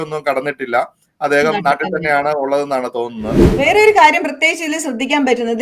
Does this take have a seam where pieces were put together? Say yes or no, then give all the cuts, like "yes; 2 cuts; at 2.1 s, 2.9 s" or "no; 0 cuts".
yes; 1 cut; at 3.4 s